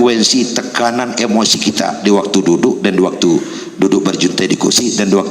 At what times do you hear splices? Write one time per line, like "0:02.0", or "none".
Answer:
none